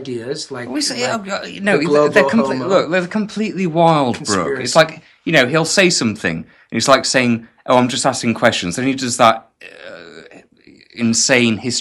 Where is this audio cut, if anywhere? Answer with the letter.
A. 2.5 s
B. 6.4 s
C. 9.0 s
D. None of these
D